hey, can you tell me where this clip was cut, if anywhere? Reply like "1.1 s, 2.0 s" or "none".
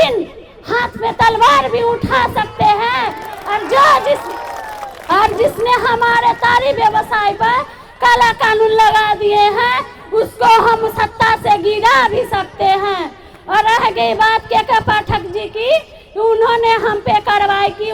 none